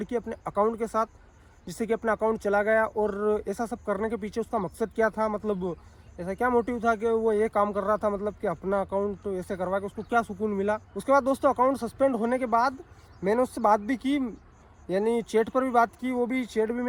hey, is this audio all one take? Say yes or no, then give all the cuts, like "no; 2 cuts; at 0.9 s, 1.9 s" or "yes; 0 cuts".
yes; 0 cuts